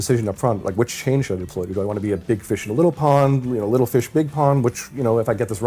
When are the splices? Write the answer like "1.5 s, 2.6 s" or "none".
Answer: none